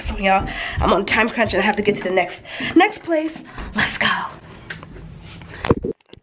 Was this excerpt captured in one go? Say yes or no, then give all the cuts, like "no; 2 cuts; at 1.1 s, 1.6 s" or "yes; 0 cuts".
yes; 0 cuts